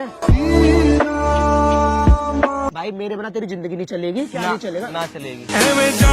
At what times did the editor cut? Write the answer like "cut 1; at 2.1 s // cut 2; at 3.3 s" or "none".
cut 1; at 2.7 s